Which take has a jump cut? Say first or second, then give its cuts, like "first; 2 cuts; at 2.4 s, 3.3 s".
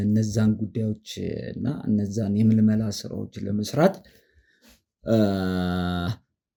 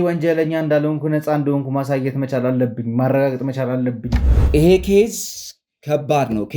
second; 1 cut; at 4.3 s